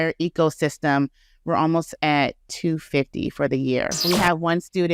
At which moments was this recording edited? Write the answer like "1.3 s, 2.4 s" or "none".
4.0 s